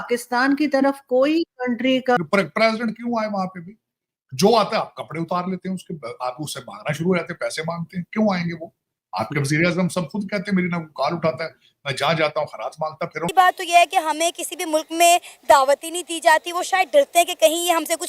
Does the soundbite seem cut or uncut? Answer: cut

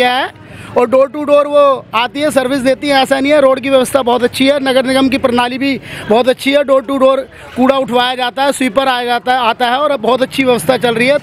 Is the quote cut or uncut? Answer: uncut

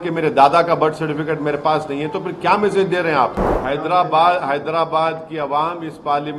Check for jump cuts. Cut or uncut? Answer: cut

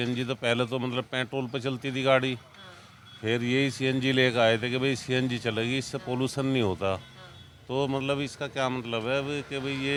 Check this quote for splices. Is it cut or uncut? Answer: uncut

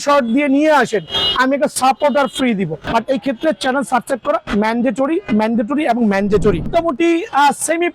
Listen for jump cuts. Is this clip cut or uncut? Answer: cut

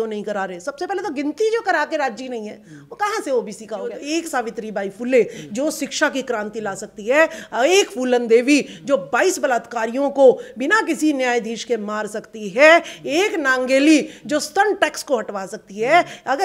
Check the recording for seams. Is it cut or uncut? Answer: cut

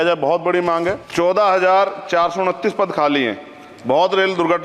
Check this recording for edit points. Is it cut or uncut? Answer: cut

